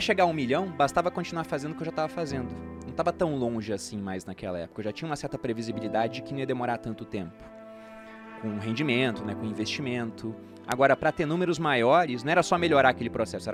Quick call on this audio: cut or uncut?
uncut